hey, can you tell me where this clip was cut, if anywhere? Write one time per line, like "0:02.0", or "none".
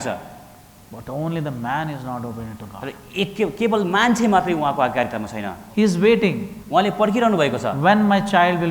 0:05.6